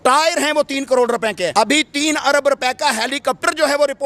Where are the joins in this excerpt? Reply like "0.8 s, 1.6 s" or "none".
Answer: 1.5 s